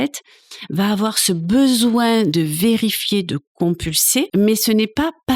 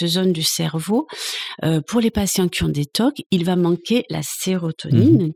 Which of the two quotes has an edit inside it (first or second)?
first